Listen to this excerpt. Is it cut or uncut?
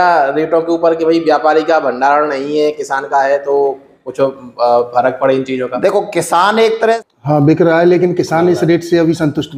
cut